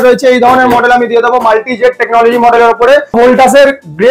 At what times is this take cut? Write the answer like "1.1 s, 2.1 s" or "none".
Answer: 3.1 s